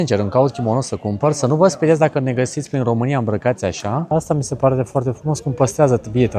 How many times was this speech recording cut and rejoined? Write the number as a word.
one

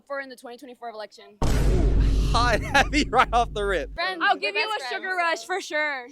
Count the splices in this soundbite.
one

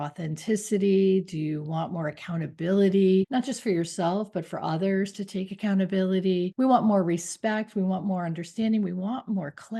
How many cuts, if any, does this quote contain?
two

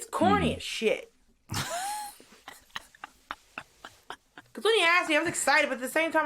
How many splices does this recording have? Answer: one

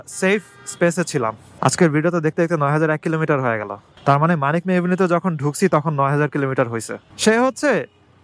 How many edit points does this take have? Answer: two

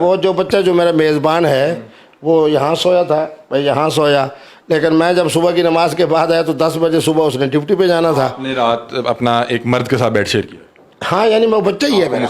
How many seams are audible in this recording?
zero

